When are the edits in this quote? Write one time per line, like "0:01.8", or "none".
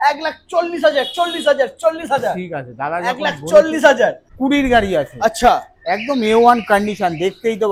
0:04.3